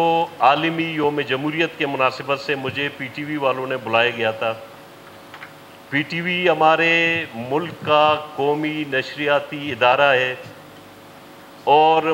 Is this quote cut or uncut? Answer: uncut